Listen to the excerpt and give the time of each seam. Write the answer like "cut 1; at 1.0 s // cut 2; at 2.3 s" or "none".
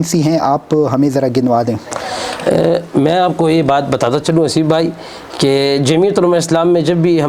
none